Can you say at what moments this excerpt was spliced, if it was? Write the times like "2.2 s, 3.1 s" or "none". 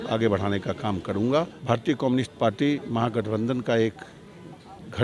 1.6 s

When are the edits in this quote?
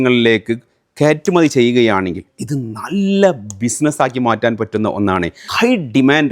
5.4 s

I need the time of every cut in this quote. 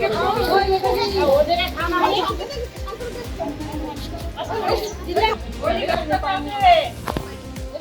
none

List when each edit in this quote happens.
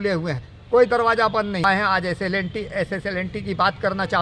1.6 s

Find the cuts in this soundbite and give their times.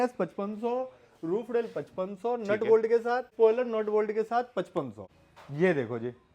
3.3 s, 5.0 s

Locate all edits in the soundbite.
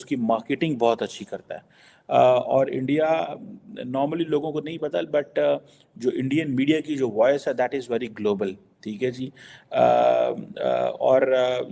none

